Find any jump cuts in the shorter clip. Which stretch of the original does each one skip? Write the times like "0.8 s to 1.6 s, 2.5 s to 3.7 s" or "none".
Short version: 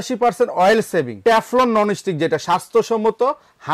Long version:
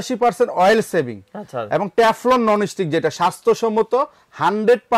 1.2 s to 1.9 s